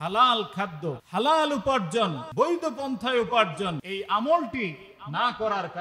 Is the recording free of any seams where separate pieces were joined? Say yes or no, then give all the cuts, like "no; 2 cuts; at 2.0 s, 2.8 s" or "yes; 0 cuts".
no; 3 cuts; at 1.0 s, 2.2 s, 3.8 s